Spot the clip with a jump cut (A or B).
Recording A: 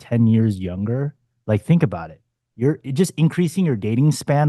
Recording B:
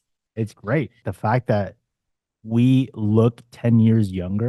B